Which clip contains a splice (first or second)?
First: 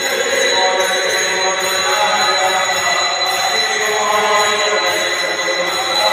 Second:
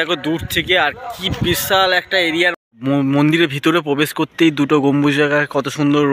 second